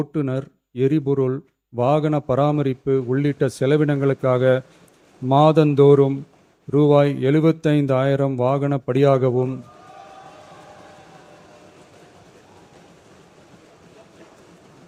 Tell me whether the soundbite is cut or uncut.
uncut